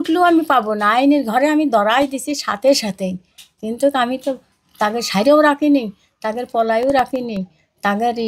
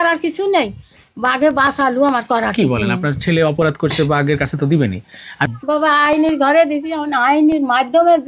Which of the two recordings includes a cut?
second; 1 cut; at 5.5 s

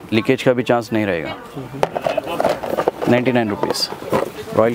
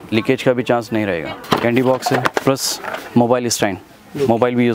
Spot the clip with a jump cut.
second; 2 cuts; at 1.3 s, 2.3 s

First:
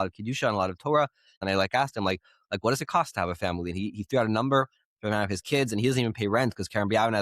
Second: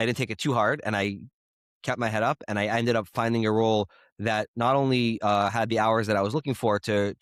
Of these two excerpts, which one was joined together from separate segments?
first; 1 cut; at 1.4 s

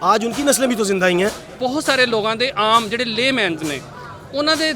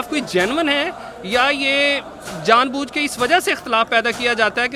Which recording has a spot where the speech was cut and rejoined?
first; 1 cut; at 1.5 s

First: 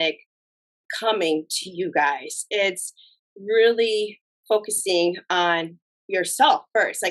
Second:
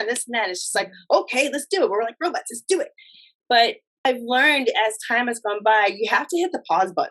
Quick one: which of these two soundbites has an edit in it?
second; 1 cut; at 4.1 s

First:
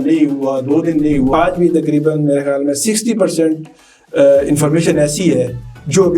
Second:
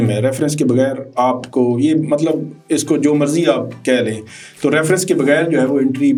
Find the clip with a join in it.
first; 1 cut; at 1.3 s

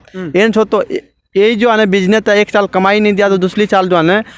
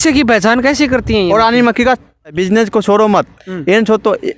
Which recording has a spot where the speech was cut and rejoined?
second; 1 cut; at 2.4 s

